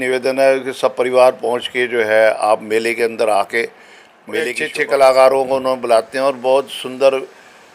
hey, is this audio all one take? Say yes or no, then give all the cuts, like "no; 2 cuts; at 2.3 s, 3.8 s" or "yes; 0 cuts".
no; 1 cut; at 4.5 s